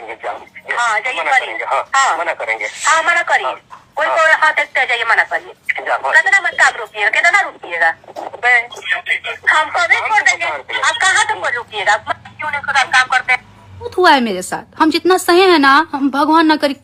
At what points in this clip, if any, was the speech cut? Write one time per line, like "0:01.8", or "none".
none